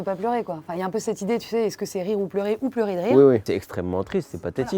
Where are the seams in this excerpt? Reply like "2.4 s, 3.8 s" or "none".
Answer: 3.4 s